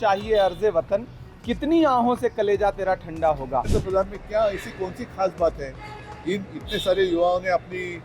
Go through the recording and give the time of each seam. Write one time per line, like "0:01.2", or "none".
0:03.7